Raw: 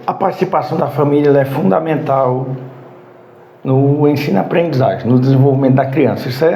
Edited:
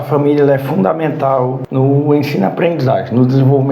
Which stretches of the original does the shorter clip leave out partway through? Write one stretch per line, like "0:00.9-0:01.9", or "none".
0:02.5-0:03.6

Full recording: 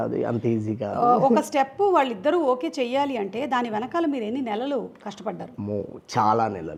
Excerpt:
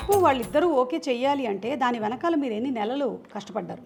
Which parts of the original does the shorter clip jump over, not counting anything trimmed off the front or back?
none

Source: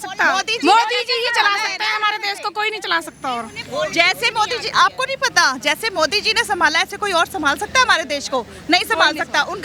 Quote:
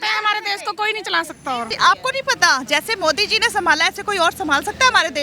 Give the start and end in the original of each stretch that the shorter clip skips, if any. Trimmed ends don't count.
0:03.5-0:04.6

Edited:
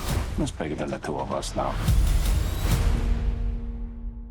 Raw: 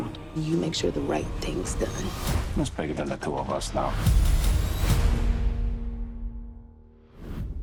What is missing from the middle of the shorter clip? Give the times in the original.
none

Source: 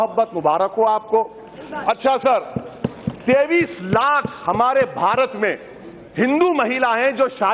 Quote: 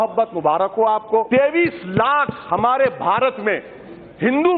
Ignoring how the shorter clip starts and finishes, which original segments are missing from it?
0:01.3-0:03.2

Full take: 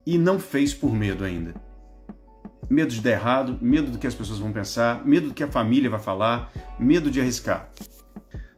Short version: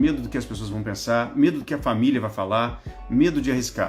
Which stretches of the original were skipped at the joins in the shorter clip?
none

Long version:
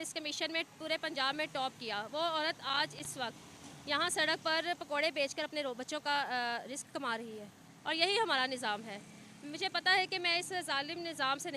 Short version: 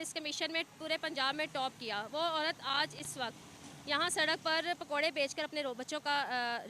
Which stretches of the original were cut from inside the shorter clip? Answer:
none

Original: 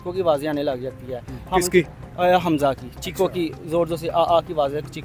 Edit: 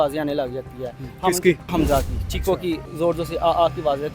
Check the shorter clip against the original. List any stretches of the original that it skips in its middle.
0:02.0-0:02.4

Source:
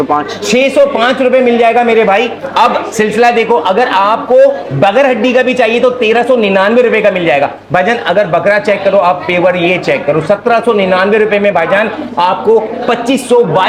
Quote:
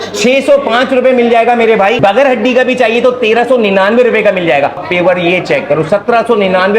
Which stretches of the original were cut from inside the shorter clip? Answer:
0:02.2-0:04.8
0:07.6-0:09.2

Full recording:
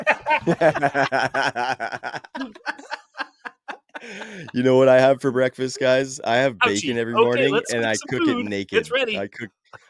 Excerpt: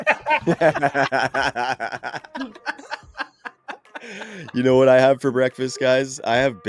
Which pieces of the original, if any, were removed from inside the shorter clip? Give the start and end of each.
none

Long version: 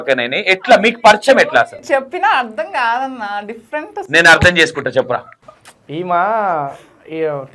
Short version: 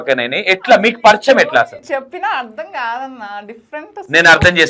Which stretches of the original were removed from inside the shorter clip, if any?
none

